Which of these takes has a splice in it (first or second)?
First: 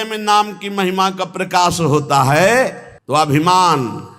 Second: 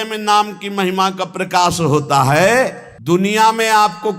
second